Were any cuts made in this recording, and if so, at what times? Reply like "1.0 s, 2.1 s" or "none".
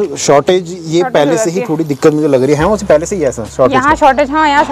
none

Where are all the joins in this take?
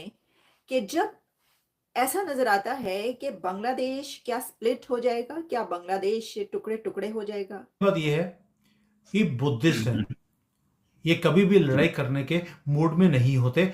7.7 s

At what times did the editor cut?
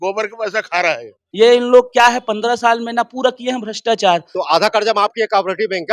1.2 s, 4.3 s

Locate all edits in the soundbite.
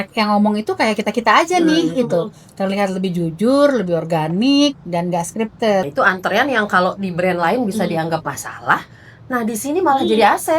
5.9 s

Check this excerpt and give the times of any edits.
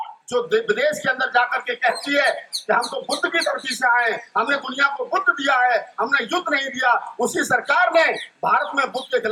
none

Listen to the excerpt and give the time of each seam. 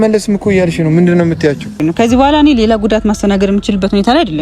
2.1 s

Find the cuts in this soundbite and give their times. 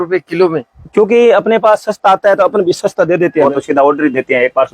3.4 s

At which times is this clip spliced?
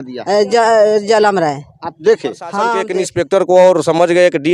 2.8 s

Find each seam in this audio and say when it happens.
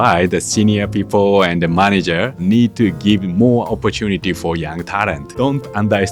2.4 s, 5.3 s

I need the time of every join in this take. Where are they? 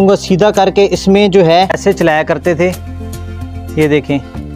1.8 s

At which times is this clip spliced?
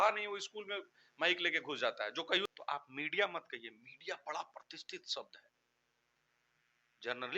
2.4 s

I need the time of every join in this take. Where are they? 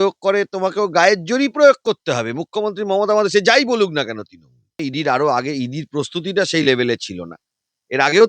4.8 s

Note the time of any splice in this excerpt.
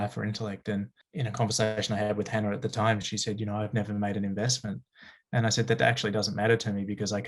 1.0 s

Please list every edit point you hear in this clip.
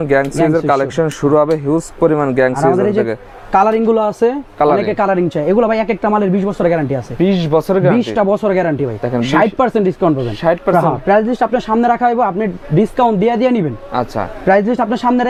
none

